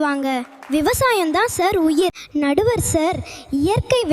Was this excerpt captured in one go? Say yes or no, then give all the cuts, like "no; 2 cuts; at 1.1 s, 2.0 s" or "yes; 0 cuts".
no; 1 cut; at 2.2 s